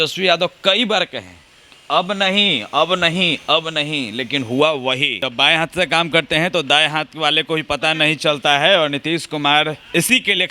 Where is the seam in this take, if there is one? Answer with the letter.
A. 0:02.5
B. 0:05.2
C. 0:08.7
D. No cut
B